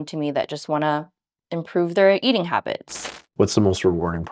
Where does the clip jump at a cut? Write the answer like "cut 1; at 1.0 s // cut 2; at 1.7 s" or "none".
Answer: cut 1; at 3.0 s